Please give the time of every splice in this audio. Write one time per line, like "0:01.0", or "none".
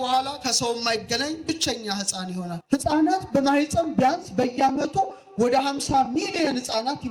0:02.5